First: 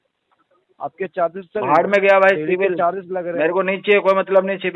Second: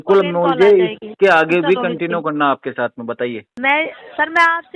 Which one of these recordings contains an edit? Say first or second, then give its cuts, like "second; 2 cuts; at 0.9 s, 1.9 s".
second; 1 cut; at 3.5 s